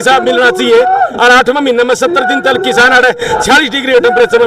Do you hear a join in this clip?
no; 0 cuts

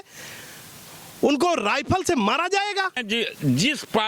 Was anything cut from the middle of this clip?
yes; 1 cut; at 3.0 s

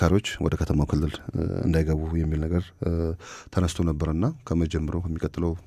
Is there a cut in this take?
no; 0 cuts

